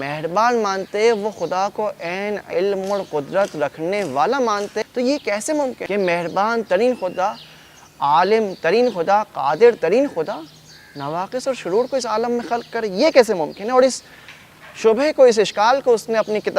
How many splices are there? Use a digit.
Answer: 2